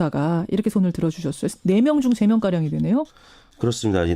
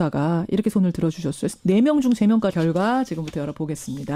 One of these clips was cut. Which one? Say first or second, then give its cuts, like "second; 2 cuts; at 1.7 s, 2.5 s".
first; 1 cut; at 2.5 s